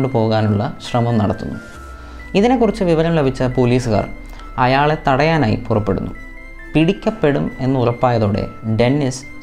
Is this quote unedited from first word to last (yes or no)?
yes